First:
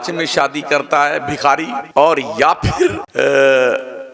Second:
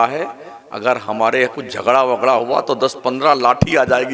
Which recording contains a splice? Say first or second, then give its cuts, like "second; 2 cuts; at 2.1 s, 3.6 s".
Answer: first; 2 cuts; at 1.8 s, 3.0 s